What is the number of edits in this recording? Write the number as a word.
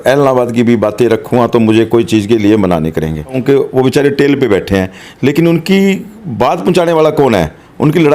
one